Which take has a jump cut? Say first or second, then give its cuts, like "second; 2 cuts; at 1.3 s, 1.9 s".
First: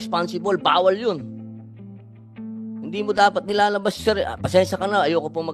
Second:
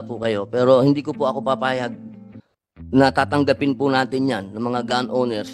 first; 2 cuts; at 1.7 s, 2.9 s